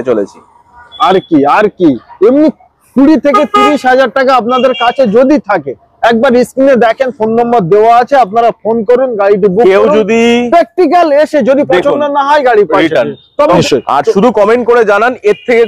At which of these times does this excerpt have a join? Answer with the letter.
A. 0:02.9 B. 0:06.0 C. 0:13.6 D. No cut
C